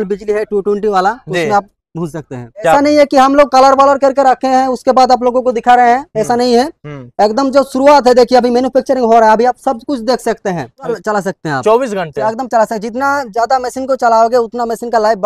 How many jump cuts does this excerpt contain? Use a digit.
2